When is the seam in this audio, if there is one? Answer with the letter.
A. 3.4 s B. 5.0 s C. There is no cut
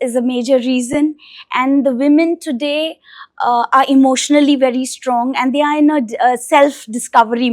C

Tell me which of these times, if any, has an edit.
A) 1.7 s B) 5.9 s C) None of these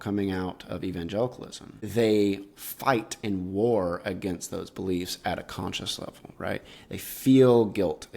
A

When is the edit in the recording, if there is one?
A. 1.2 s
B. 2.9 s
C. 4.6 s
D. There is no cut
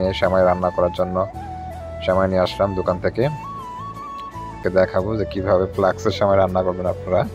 C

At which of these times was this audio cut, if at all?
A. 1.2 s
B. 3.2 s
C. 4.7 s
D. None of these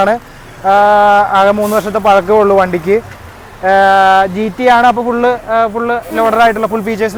D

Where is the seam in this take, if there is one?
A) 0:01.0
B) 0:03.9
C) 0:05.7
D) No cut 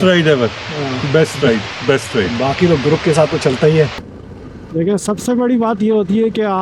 B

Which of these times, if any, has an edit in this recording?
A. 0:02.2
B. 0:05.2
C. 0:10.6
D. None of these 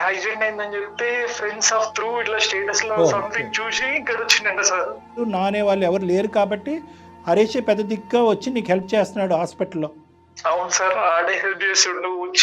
B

